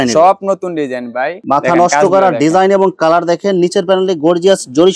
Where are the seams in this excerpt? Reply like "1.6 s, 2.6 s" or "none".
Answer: 1.4 s